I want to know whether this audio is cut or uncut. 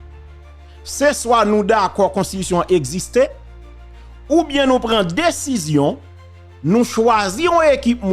cut